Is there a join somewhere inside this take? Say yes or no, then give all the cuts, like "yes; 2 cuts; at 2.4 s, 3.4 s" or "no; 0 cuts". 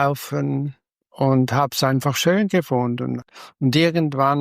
yes; 1 cut; at 3.2 s